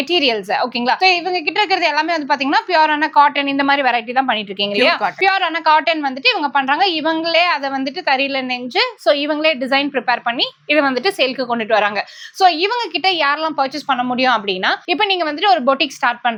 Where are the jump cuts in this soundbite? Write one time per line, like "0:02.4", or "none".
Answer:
none